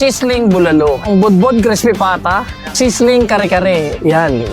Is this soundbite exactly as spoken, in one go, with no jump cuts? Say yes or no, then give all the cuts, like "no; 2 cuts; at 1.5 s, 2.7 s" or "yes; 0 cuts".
no; 2 cuts; at 1.1 s, 2.6 s